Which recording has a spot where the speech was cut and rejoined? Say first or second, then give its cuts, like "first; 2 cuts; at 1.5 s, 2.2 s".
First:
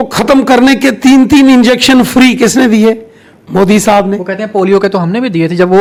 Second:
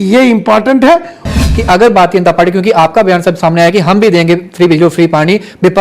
second; 1 cut; at 1.3 s